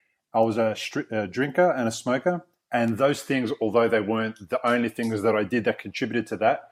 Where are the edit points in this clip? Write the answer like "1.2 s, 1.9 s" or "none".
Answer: none

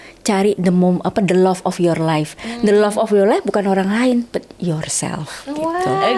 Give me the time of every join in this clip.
none

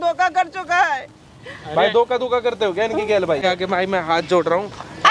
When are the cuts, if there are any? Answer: 3.4 s

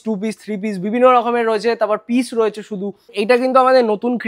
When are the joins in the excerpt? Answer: 3.1 s

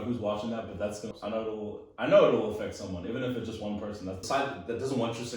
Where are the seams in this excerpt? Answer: 1.1 s, 4.2 s

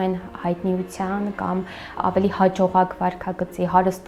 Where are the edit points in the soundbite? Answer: 2.0 s

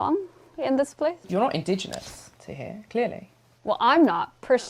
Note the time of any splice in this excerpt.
1.2 s

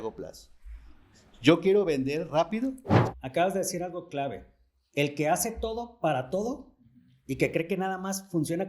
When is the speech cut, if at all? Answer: 2.9 s

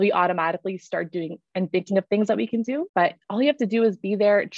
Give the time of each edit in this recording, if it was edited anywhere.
2.9 s

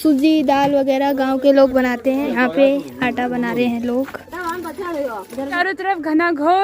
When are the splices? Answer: 2.3 s, 5.6 s

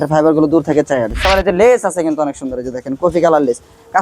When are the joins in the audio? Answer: 1.2 s

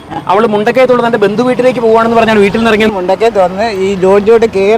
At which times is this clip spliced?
2.9 s

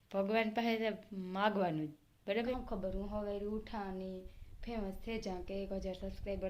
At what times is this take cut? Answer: 2.6 s

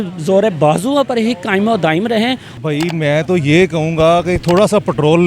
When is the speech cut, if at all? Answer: 2.5 s

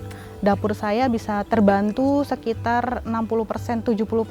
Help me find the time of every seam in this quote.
1.4 s

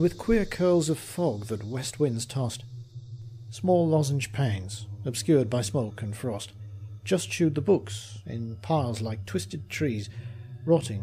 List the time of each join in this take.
none

